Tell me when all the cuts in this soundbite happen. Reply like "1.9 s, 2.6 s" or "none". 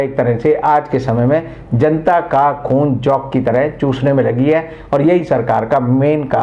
none